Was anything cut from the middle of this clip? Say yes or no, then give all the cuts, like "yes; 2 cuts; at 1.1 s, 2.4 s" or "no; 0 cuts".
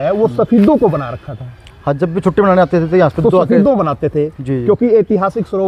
no; 0 cuts